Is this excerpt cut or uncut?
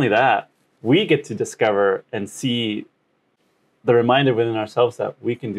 uncut